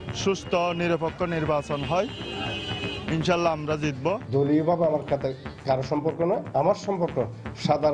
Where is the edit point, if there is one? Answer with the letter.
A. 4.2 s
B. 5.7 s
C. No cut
A